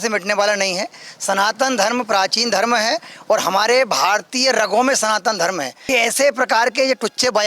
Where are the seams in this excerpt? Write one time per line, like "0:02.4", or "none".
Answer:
0:05.8